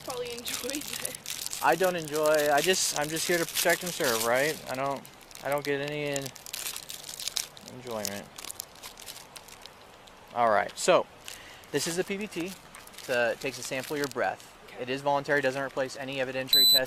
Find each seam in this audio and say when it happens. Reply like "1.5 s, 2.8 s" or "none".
none